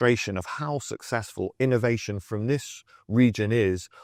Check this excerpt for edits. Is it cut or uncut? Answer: uncut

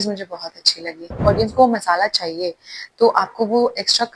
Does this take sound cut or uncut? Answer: cut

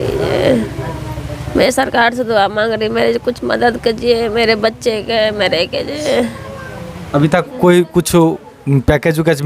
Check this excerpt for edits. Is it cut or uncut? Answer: uncut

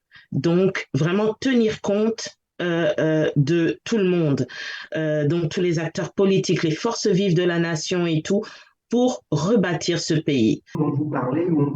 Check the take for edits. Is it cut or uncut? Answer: cut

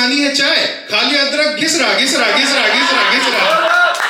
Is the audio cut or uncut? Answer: uncut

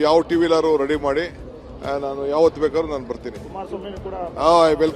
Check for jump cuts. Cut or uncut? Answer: uncut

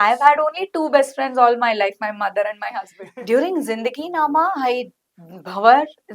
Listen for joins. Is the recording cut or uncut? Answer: cut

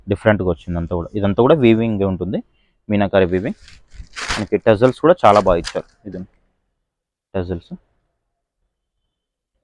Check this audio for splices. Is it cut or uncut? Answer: uncut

